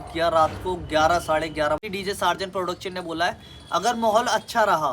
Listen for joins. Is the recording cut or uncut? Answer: cut